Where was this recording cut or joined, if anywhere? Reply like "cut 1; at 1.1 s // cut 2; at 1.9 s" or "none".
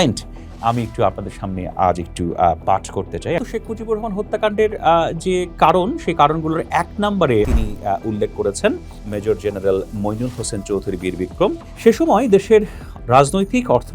cut 1; at 3.4 s // cut 2; at 7.5 s // cut 3; at 11.7 s